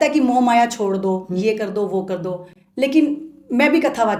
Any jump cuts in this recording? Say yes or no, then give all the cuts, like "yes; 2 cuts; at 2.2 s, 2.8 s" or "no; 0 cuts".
no; 0 cuts